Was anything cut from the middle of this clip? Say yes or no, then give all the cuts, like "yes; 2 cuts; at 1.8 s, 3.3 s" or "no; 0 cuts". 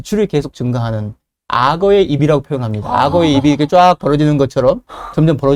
no; 0 cuts